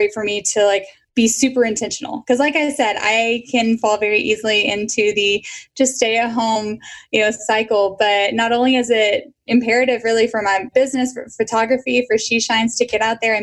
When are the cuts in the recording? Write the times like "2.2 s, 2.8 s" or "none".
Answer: 1.8 s, 6.6 s